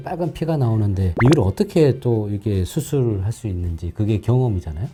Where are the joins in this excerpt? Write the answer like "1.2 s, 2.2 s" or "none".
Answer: none

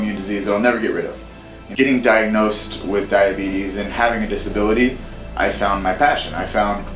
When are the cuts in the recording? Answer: 1.6 s

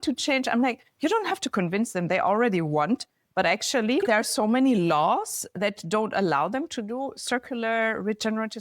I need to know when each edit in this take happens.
4.1 s, 5.5 s

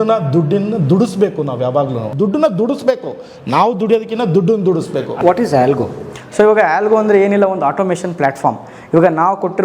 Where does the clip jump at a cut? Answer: 2.1 s, 5.1 s

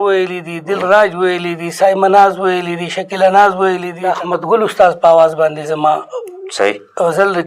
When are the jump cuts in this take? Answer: 4.0 s

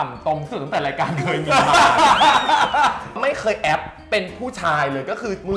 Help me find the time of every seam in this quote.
3.1 s

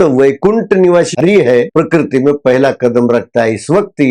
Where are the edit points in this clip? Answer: 1.2 s

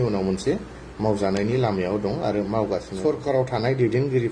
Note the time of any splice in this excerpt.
3.0 s

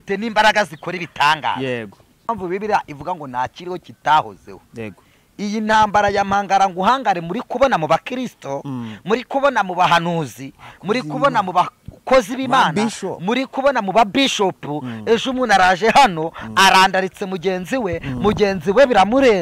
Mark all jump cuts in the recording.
2.3 s

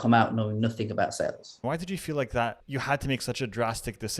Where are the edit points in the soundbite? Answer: 1.6 s, 2.6 s

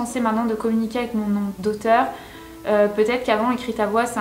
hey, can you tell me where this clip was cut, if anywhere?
none

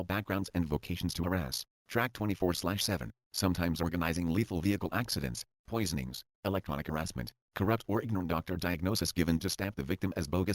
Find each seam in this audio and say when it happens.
2.3 s, 7.4 s

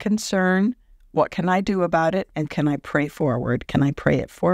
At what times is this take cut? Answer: 2.5 s

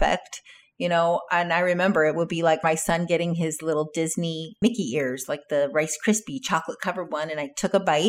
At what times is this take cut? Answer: 2.6 s, 4.5 s

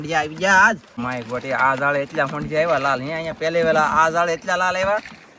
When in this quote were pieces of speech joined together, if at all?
1.0 s

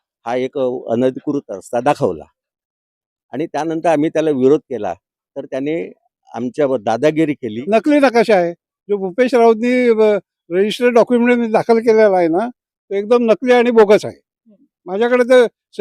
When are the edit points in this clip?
7.5 s

